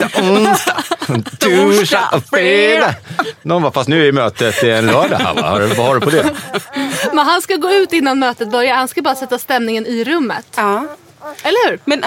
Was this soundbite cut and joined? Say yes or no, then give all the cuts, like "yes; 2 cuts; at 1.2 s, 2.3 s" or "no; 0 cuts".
no; 0 cuts